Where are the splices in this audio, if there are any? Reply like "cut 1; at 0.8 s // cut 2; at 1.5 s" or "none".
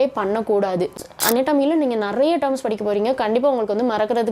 cut 1; at 1.0 s